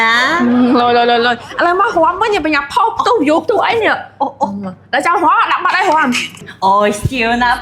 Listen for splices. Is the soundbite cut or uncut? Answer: uncut